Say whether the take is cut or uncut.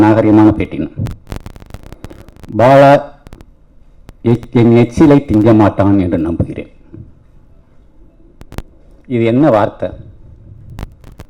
uncut